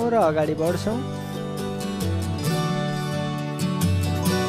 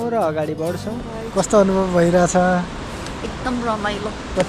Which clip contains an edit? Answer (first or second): second